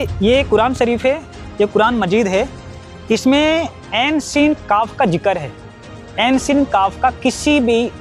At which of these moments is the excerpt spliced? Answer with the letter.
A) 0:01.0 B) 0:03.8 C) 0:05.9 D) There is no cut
B